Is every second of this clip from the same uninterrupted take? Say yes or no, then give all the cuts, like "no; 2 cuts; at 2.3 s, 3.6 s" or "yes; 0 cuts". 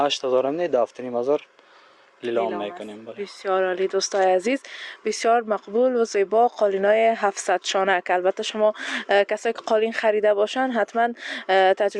yes; 0 cuts